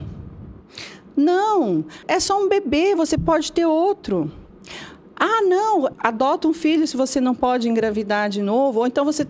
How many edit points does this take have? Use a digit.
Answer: 2